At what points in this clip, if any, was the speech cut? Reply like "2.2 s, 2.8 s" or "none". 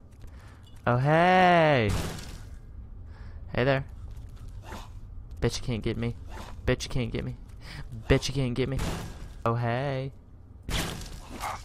9.5 s